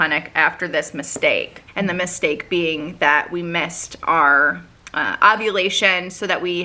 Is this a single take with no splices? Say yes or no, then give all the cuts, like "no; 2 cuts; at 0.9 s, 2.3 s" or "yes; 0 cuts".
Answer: yes; 0 cuts